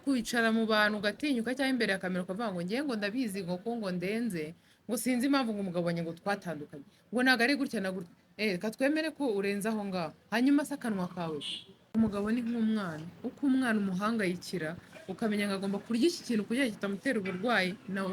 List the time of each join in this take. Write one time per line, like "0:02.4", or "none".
0:11.9